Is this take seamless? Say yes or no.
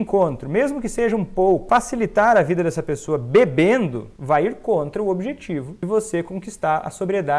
no